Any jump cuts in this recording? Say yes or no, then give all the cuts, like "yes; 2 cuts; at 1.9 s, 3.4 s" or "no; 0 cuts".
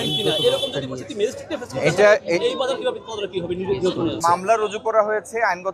yes; 1 cut; at 4.2 s